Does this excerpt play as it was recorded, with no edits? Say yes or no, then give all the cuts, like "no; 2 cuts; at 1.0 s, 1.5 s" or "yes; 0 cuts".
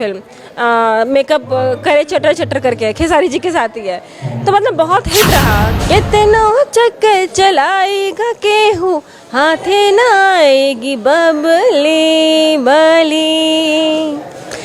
no; 1 cut; at 5.7 s